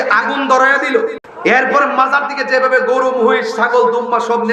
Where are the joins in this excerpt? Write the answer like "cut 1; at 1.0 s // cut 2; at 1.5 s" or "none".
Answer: cut 1; at 1.3 s